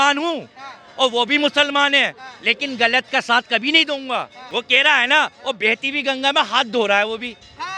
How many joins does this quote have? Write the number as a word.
one